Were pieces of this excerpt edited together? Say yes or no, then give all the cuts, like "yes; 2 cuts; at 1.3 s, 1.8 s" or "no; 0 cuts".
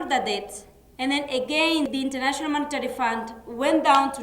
yes; 1 cut; at 1.9 s